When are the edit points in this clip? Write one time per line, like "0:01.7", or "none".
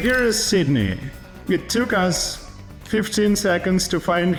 none